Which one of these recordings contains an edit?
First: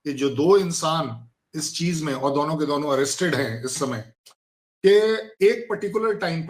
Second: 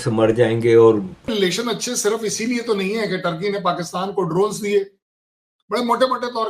second; 1 cut; at 1.3 s

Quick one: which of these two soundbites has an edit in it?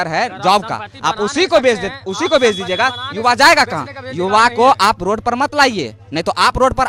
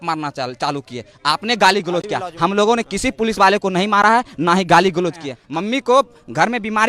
second; 1 cut; at 5.3 s

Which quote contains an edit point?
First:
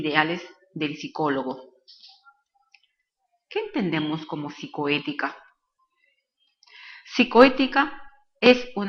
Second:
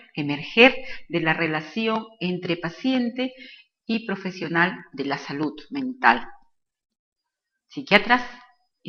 first; 1 cut; at 6.2 s

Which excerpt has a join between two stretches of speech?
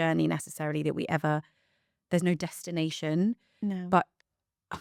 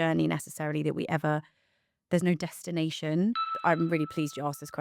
second; 1 cut; at 3.5 s

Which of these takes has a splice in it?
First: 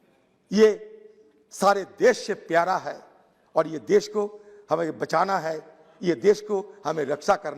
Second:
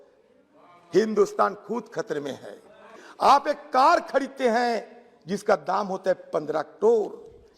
second; 1 cut; at 2.9 s

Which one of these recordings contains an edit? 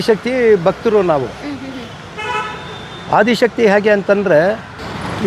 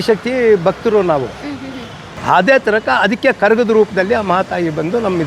second; 1 cut; at 2.2 s

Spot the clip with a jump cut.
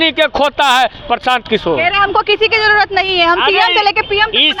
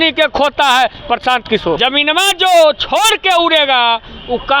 second; 1 cut; at 1.8 s

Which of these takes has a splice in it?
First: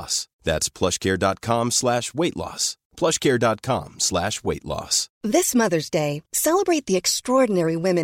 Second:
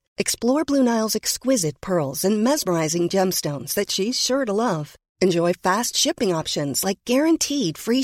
first; 1 cut; at 5.0 s

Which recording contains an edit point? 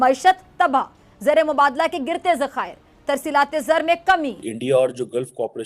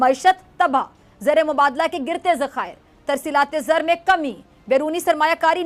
first; 1 cut; at 4.5 s

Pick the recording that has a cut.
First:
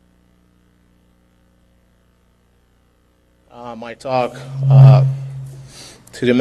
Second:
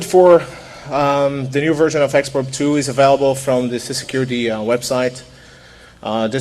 second; 1 cut; at 1.1 s

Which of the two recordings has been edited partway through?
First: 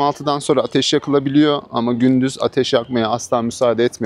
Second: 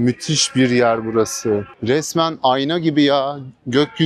second; 1 cut; at 1.7 s

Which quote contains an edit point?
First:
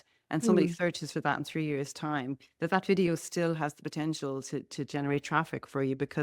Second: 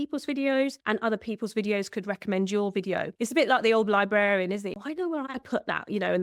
second; 2 cuts; at 3.1 s, 4.7 s

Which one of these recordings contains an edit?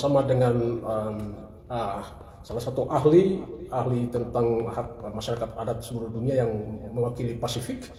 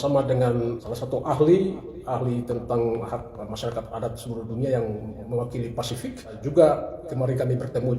second; 2 cuts; at 0.8 s, 6.4 s

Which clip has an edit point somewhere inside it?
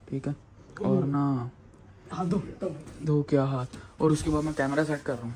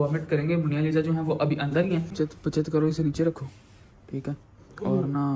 second; 1 cut; at 2.1 s

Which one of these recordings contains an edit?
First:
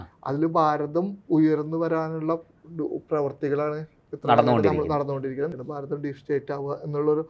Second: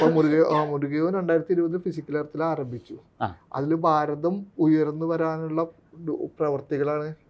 first; 1 cut; at 5.5 s

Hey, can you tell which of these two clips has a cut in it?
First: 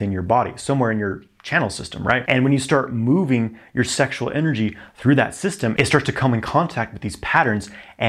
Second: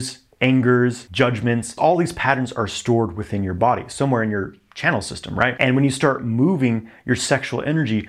second; 1 cut; at 1.8 s

